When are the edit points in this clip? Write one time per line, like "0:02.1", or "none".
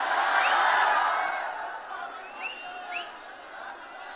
none